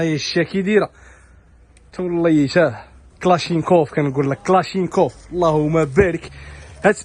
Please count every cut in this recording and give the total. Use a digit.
0